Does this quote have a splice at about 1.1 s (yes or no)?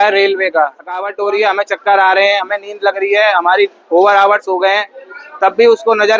yes